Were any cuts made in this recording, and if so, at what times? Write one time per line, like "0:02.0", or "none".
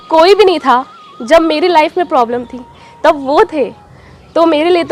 none